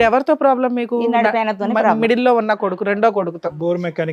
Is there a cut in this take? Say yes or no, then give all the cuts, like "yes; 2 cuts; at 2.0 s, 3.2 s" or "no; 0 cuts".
no; 0 cuts